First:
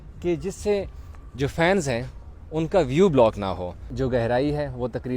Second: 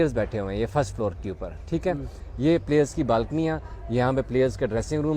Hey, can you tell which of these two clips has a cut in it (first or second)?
first